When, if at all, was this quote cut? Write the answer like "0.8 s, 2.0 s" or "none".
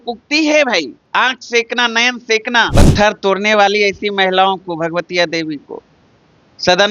1.0 s, 2.7 s